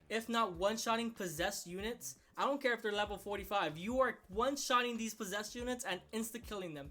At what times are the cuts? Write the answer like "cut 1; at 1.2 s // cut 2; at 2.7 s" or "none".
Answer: none